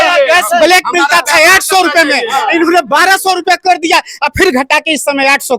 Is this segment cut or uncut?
uncut